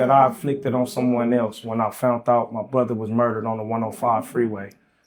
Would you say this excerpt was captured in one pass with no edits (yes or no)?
yes